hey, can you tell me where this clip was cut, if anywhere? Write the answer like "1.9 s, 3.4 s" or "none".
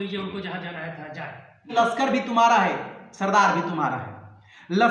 1.7 s